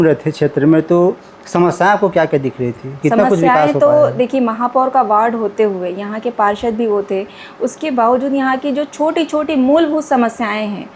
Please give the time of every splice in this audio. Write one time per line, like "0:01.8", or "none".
none